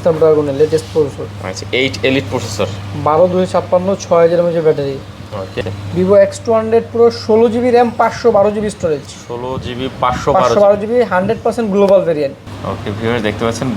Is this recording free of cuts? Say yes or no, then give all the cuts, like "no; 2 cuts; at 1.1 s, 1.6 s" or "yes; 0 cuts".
no; 2 cuts; at 5.5 s, 12.5 s